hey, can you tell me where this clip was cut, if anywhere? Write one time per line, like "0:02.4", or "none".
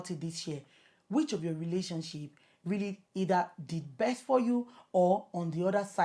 none